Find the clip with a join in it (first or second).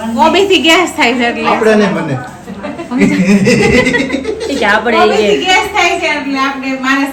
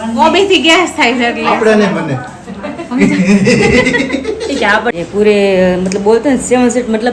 second